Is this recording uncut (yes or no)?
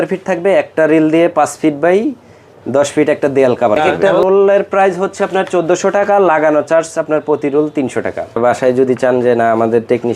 no